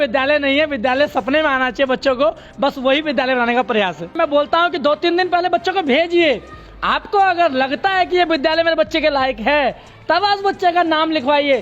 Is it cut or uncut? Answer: cut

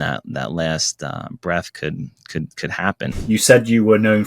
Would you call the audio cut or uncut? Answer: cut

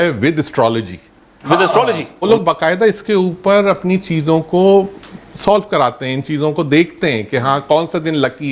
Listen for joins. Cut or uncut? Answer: cut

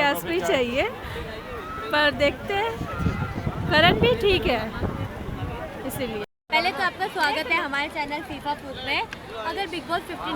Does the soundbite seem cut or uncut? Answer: uncut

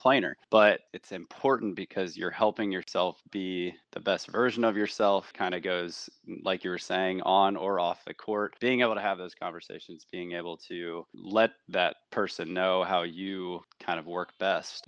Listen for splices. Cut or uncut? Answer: uncut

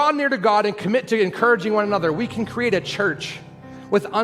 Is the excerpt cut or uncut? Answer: uncut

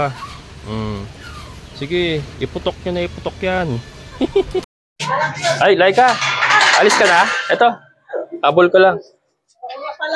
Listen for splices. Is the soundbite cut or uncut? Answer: cut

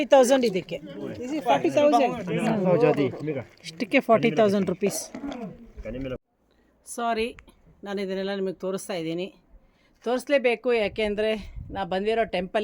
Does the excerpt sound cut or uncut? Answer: cut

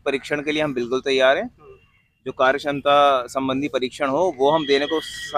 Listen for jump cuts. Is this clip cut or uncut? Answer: uncut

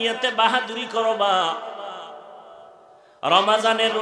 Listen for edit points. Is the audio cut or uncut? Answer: cut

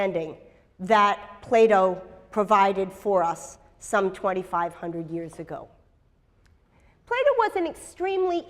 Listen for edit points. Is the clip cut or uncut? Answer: cut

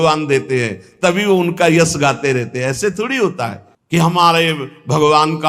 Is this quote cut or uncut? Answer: uncut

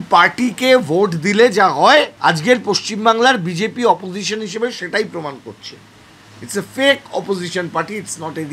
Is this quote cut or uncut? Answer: cut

